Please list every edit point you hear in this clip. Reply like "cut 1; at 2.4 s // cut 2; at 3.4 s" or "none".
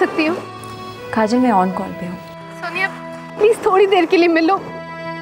none

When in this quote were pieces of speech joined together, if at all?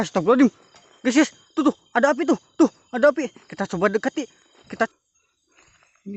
cut 1; at 4.9 s

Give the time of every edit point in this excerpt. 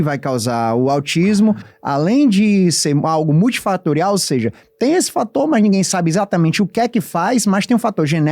cut 1; at 1.7 s

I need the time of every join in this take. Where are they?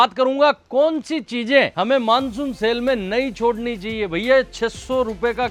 none

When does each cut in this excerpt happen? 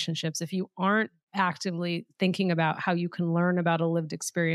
none

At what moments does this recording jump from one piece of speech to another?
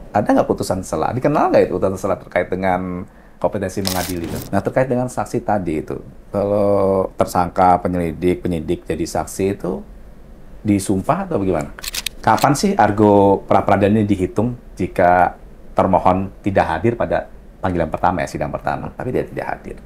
cut 1; at 4.3 s // cut 2; at 12.1 s

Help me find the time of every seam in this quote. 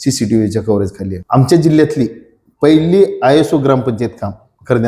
cut 1; at 1.1 s

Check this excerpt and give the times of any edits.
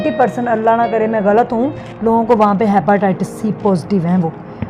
none

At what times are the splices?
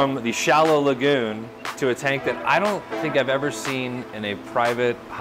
none

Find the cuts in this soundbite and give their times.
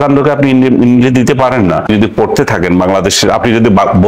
cut 1; at 1.9 s

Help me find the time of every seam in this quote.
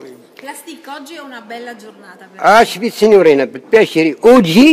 cut 1; at 3.5 s

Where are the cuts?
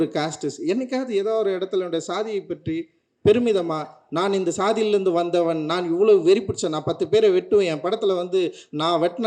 none

